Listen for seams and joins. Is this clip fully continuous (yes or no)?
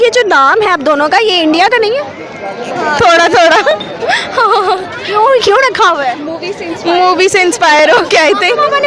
yes